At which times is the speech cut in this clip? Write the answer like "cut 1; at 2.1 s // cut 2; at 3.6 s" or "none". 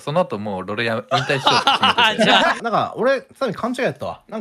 cut 1; at 2.6 s